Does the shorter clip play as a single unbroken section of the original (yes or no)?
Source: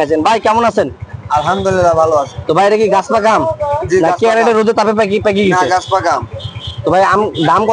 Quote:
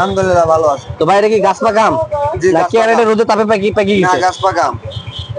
yes